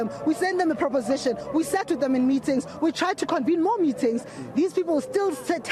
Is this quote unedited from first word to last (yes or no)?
yes